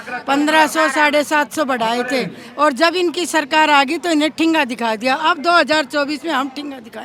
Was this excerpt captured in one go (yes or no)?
yes